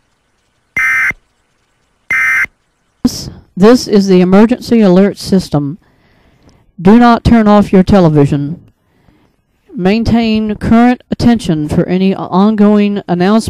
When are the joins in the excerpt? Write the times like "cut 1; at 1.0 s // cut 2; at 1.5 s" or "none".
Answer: cut 1; at 3.0 s

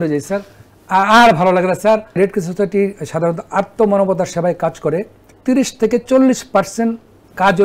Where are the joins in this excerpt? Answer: cut 1; at 2.2 s // cut 2; at 5.3 s

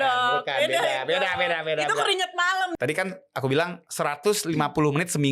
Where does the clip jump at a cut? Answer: cut 1; at 2.7 s

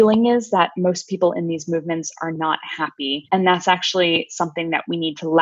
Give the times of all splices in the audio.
cut 1; at 3.2 s

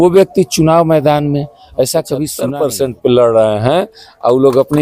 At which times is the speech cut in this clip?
cut 1; at 2.4 s

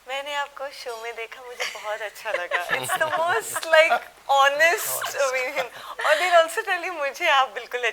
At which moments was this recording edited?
none

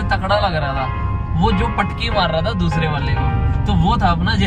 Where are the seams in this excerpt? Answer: none

